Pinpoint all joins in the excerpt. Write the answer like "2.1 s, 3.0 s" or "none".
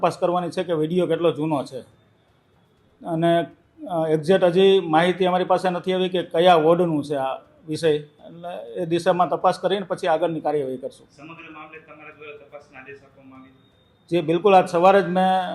none